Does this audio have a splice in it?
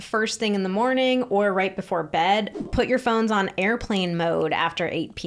yes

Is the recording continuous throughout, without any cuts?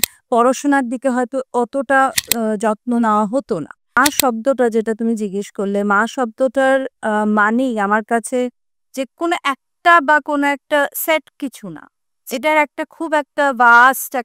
no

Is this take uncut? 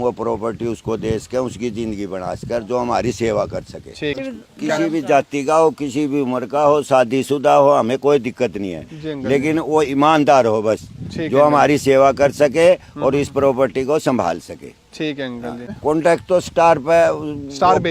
no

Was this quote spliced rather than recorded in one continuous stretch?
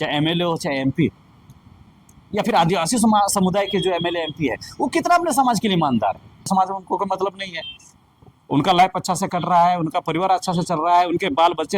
yes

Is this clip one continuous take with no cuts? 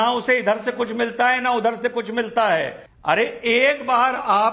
no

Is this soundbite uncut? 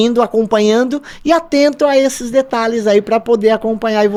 yes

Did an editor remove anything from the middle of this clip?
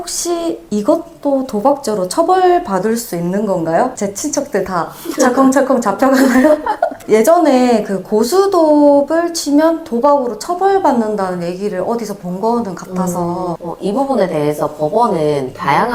no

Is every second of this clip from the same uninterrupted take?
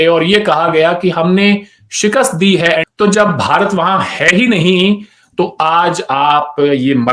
no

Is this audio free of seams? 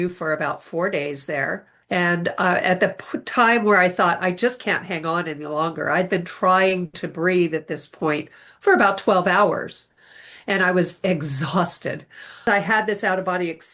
no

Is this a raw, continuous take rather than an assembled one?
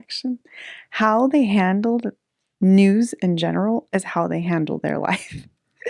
yes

